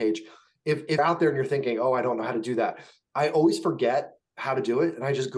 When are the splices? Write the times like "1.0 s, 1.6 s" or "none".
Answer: 1.0 s